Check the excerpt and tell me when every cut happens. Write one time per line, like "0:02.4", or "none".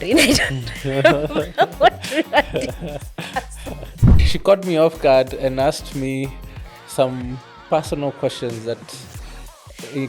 0:04.1